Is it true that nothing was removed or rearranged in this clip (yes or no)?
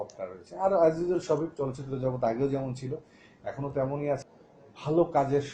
no